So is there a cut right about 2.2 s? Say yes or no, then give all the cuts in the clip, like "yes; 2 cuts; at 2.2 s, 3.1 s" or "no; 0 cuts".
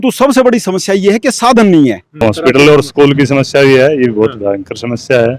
yes; 1 cut; at 2.2 s